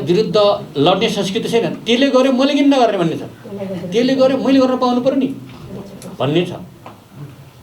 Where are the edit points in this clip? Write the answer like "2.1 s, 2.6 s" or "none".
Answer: none